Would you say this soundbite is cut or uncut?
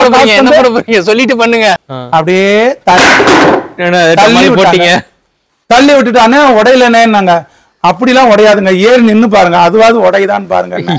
cut